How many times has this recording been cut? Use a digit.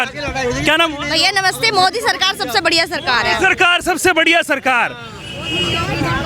0